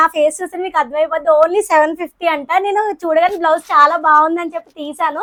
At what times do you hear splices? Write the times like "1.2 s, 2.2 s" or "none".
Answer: none